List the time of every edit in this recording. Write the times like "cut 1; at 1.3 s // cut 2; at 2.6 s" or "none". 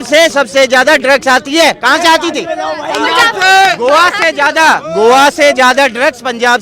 none